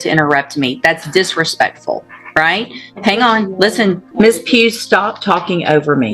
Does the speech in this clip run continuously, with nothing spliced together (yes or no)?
no